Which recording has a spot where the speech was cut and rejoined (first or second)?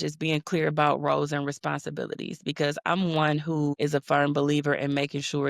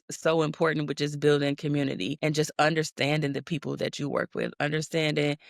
second